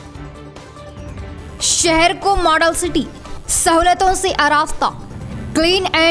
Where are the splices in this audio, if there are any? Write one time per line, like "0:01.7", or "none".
none